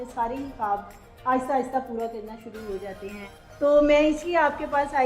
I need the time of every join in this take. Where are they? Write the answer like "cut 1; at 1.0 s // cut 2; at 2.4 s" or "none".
cut 1; at 3.4 s